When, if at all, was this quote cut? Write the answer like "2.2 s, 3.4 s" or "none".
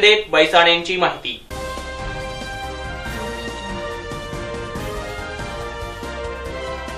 none